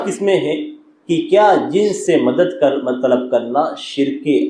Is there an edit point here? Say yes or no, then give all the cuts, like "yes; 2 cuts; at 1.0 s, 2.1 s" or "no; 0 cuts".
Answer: no; 0 cuts